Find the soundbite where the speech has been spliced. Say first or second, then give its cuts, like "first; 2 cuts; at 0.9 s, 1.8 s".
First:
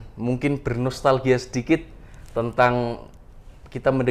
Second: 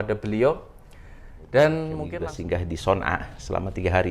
second; 1 cut; at 2.0 s